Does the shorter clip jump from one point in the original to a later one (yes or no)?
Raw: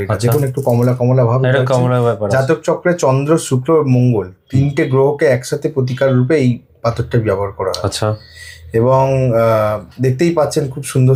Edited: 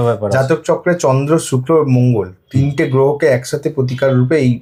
no